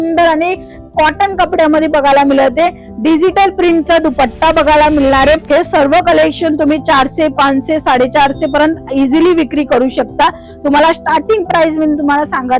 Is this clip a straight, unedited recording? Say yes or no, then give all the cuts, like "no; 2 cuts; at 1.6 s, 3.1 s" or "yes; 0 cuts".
no; 1 cut; at 5.4 s